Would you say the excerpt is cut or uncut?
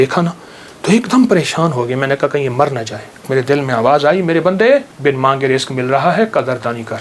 cut